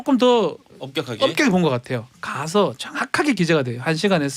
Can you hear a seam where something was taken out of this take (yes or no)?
no